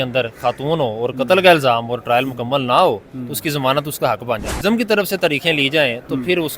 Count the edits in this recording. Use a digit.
1